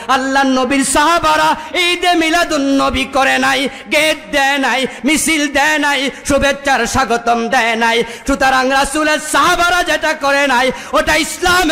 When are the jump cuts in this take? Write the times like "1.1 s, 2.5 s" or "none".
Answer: none